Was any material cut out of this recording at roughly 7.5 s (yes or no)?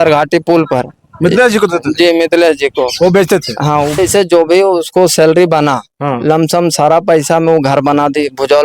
no